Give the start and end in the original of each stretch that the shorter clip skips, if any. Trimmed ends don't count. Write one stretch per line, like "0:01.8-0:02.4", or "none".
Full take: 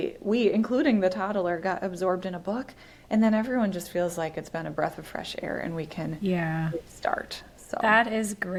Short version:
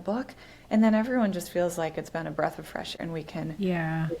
0:05.4-0:05.6